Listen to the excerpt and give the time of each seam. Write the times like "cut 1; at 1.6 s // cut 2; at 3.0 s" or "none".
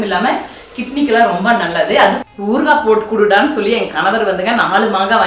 cut 1; at 2.2 s